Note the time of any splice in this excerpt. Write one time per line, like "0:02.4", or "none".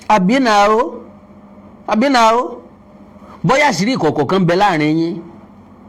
none